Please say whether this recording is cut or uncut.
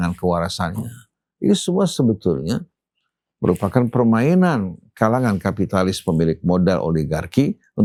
uncut